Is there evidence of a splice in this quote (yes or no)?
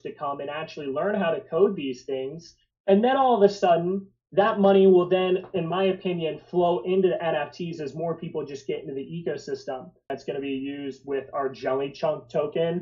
yes